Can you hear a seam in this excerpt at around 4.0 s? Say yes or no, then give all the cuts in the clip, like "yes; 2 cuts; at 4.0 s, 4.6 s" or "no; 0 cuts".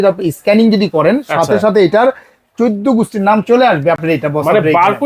no; 0 cuts